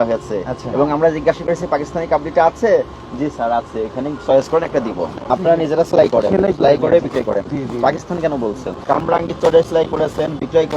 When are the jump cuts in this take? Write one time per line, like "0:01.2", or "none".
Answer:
0:05.3
0:08.7